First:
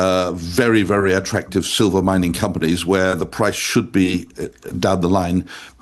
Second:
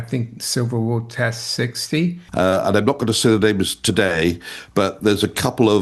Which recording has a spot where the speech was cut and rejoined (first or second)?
second